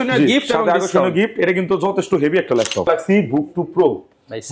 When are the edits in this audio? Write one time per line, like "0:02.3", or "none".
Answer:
0:02.9